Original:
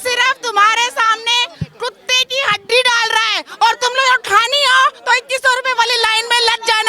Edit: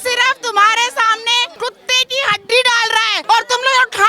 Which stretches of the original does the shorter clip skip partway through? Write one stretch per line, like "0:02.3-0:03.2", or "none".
0:01.5-0:01.7
0:03.3-0:03.5